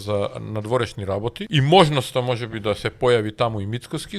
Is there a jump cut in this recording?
yes; 1 cut; at 1.4 s

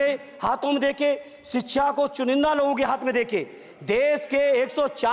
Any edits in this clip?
no; 0 cuts

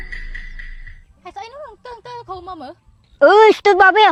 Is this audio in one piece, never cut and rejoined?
yes; 0 cuts

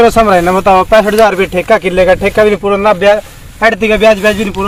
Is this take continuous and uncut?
yes; 0 cuts

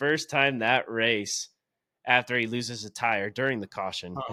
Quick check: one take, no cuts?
yes; 0 cuts

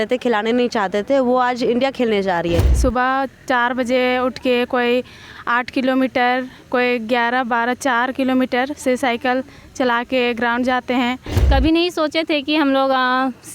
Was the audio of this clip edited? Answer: yes; 2 cuts; at 2.7 s, 11.3 s

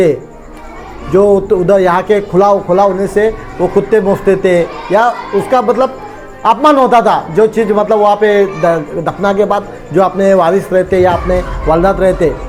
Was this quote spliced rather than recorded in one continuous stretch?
no; 0 cuts

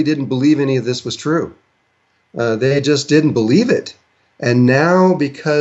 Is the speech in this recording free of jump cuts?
yes; 0 cuts

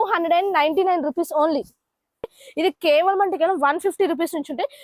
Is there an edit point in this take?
yes; 1 cut; at 2.4 s

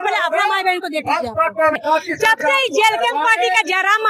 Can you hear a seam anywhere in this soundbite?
yes; 1 cut; at 1.8 s

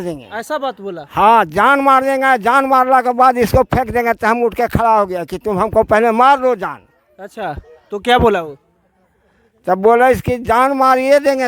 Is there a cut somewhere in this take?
no; 0 cuts

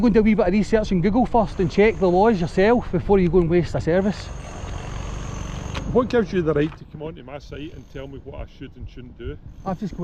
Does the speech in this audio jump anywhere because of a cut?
no; 0 cuts

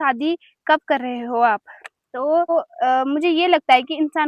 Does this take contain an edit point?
yes; 1 cut; at 2.5 s

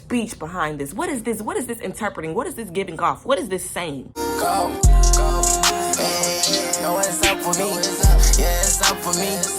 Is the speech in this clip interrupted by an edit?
yes; 1 cut; at 4.1 s

